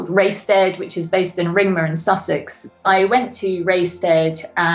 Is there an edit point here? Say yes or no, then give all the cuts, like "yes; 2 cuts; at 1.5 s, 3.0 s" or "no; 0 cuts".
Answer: yes; 1 cut; at 2.8 s